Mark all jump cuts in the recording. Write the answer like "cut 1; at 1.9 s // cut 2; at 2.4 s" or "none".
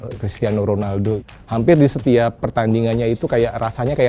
cut 1; at 1.3 s